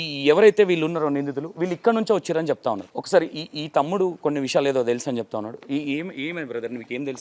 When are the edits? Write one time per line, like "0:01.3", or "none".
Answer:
0:02.9